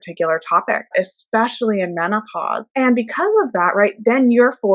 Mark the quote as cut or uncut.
cut